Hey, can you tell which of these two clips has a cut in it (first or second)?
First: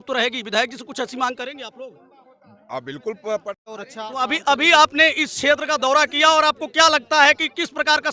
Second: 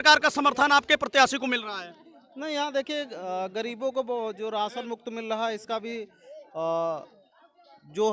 first